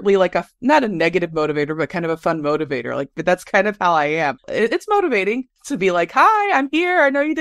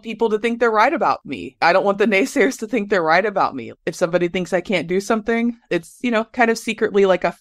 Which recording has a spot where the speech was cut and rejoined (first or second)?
second